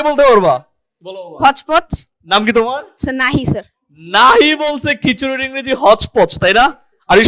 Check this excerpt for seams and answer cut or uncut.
uncut